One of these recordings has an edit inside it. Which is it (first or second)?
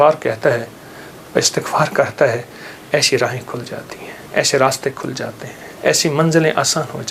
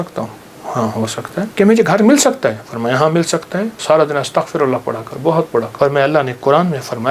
second